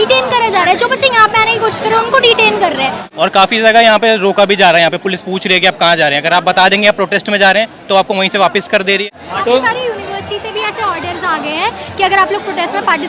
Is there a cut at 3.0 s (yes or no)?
yes